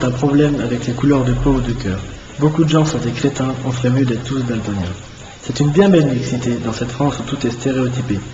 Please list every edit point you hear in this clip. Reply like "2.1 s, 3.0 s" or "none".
6.6 s